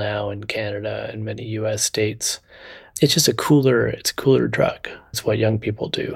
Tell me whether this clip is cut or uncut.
cut